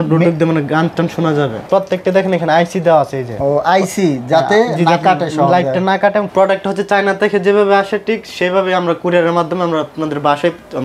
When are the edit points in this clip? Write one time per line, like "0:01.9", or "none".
0:01.7
0:06.3